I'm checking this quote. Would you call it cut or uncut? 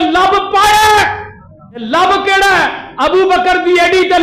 cut